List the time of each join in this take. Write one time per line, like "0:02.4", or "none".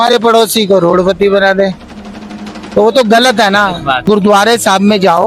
0:04.0

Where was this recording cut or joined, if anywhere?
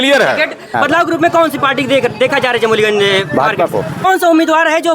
0:00.7
0:04.0

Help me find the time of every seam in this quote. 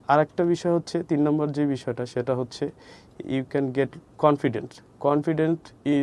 0:04.1

